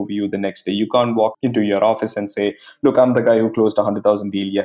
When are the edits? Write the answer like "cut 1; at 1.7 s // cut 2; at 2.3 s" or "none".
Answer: cut 1; at 1.4 s